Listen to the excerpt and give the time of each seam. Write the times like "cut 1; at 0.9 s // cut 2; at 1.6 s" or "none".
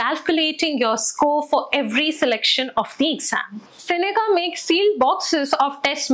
none